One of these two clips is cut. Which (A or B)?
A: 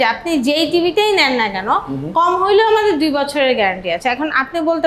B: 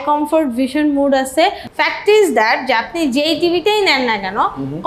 B